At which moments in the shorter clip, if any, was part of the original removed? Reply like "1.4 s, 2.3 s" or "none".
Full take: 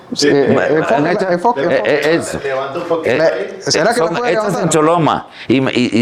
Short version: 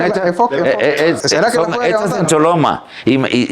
1.2 s